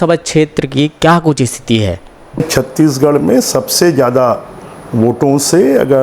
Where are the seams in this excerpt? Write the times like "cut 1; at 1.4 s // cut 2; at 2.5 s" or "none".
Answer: cut 1; at 2.5 s